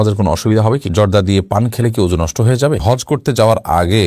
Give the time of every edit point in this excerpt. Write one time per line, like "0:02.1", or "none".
0:00.9
0:02.8